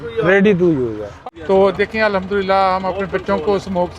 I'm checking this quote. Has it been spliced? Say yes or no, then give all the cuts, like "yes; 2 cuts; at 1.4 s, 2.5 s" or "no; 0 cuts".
yes; 1 cut; at 1.1 s